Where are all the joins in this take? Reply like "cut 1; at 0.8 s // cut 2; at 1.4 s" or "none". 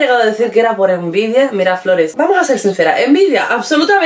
none